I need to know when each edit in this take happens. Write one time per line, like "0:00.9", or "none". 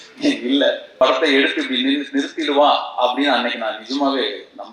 0:01.0

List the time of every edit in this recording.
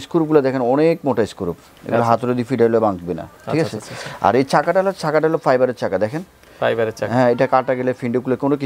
none

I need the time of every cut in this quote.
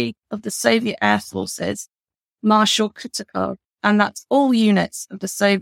none

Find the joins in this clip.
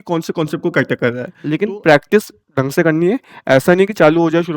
0:01.3

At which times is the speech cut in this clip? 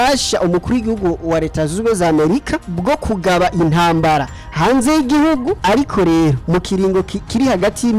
0:02.7
0:05.6
0:06.4

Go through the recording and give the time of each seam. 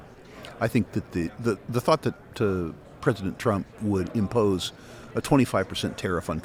none

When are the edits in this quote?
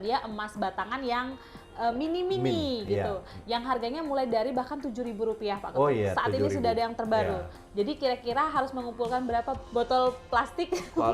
0:07.6
0:09.6

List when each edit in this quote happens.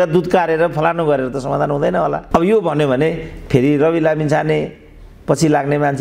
none

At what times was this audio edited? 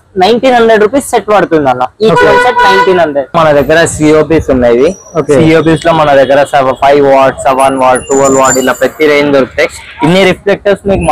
0:03.4

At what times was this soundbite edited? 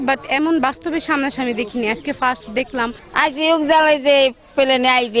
0:03.1

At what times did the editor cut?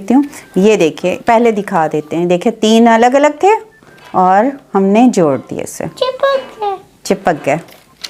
none

